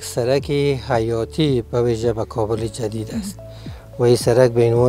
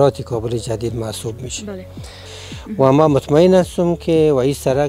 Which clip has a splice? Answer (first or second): second